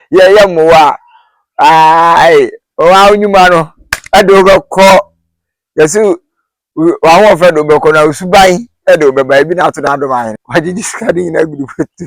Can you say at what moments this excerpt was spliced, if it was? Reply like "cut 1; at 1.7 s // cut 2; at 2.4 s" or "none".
cut 1; at 10.4 s